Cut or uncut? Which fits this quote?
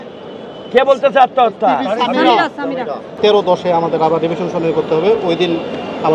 cut